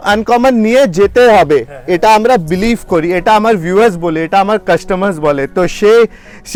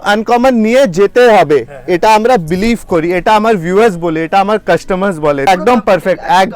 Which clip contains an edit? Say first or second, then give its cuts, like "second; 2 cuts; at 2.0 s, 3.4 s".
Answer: second; 1 cut; at 5.5 s